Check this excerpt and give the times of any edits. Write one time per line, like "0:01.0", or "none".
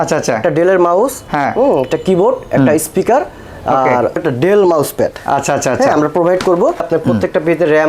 0:04.2
0:06.9